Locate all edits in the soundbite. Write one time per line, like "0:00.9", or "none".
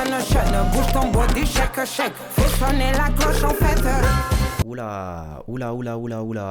0:02.5